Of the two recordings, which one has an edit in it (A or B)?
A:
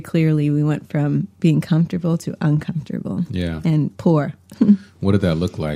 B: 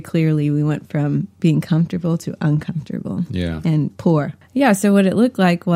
B